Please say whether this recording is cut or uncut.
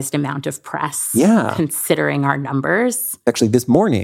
cut